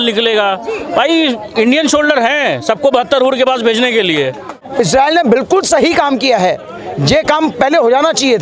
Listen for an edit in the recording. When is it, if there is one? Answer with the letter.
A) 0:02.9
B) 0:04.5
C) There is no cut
B